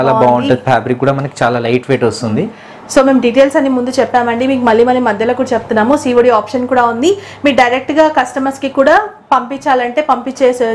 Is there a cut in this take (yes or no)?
no